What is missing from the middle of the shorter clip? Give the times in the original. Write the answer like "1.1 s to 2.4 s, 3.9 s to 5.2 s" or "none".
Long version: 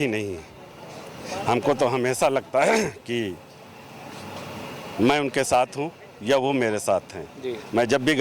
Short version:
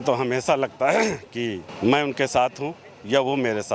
3.4 s to 4.8 s